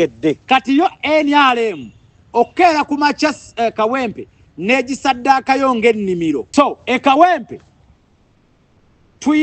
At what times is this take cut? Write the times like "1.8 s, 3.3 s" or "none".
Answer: 6.4 s